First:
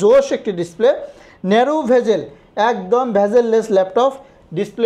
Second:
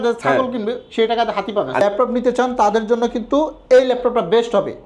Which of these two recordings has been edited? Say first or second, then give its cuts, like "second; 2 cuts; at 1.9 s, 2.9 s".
second; 1 cut; at 1.8 s